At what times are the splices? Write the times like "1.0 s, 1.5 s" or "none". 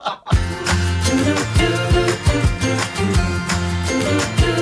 none